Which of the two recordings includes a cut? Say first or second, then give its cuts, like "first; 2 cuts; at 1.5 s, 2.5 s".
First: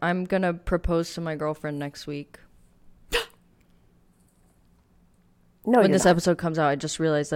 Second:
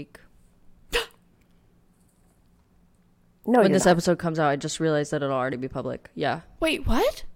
second; 1 cut; at 6.5 s